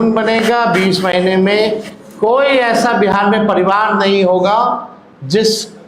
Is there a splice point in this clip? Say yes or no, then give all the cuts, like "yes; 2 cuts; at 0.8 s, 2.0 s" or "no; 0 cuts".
no; 0 cuts